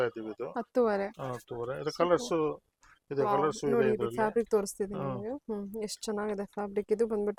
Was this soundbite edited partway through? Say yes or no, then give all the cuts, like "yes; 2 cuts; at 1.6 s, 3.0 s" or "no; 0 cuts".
no; 0 cuts